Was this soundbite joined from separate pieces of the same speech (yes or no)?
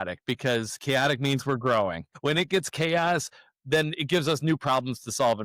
yes